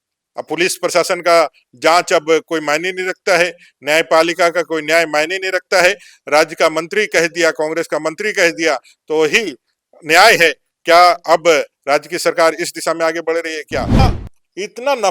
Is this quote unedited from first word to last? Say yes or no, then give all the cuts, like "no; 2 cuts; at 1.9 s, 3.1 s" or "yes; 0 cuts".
no; 1 cut; at 14.0 s